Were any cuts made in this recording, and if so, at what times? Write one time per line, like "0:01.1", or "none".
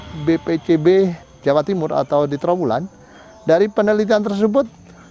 0:01.3